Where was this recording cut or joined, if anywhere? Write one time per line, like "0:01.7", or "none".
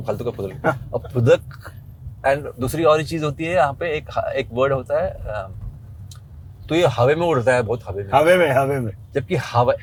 none